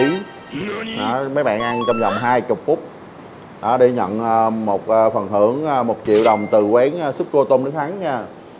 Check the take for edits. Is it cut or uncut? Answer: uncut